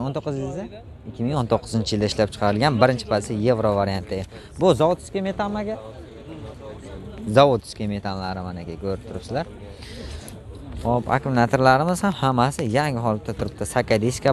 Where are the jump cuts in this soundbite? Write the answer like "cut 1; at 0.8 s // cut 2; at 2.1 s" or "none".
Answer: none